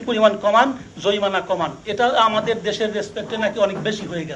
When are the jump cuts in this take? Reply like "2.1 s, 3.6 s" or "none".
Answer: none